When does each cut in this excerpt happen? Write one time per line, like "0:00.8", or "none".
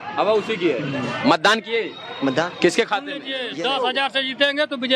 0:03.4